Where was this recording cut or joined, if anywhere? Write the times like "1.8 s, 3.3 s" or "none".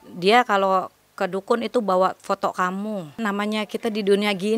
3.1 s